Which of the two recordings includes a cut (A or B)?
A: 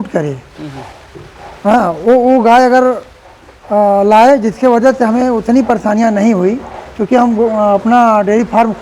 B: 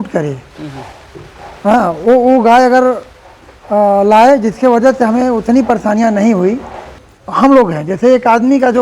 B